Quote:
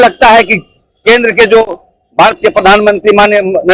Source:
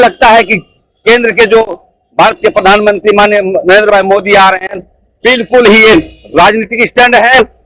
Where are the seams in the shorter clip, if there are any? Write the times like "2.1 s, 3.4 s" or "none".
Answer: none